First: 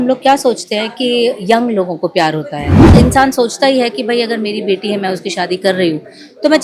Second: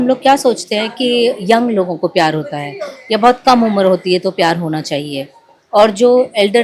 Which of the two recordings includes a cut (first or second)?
first